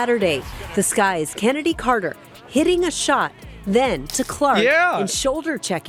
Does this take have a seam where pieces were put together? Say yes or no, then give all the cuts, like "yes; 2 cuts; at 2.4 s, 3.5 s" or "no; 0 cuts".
no; 0 cuts